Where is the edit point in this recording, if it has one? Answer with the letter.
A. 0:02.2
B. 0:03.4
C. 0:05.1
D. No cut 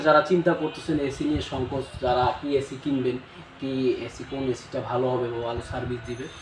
D